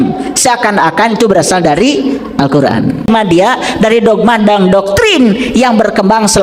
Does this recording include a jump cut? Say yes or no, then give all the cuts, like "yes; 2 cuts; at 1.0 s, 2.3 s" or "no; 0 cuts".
yes; 1 cut; at 3.0 s